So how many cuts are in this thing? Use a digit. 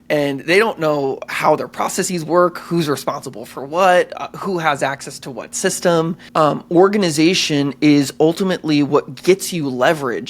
1